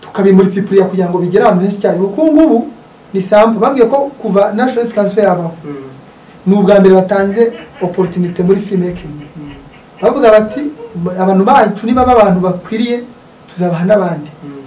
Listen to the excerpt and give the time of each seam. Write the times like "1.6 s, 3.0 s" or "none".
none